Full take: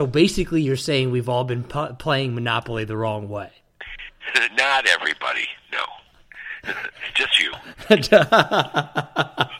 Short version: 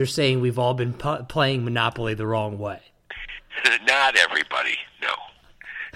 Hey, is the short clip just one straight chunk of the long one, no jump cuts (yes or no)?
yes